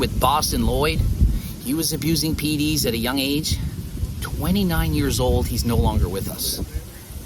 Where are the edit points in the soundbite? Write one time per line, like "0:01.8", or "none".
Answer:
none